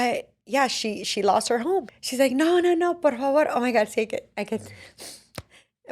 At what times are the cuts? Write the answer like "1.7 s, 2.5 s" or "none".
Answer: 1.9 s